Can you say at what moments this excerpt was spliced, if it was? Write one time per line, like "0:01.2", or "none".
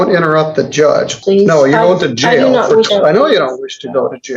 0:01.2
0:02.9